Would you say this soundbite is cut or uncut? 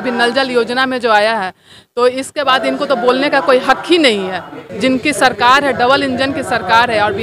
cut